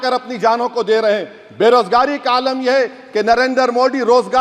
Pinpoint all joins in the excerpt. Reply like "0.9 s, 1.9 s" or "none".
none

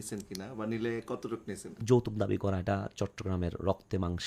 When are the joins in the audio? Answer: 1.8 s

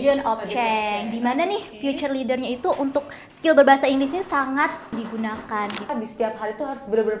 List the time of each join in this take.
4.9 s, 5.9 s

